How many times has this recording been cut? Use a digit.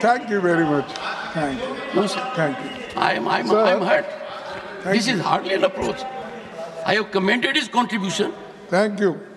0